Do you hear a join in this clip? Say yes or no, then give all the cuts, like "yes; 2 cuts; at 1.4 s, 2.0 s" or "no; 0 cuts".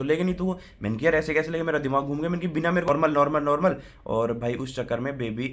yes; 1 cut; at 2.9 s